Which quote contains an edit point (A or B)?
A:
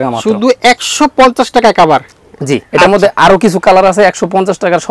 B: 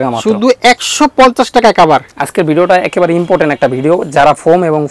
B